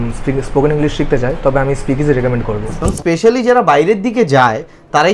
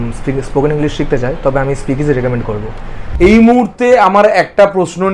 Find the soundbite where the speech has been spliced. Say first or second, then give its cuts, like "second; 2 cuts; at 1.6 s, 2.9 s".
first; 1 cut; at 2.7 s